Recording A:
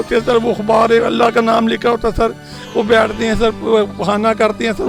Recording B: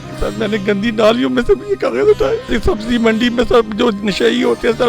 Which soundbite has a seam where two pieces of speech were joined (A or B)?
B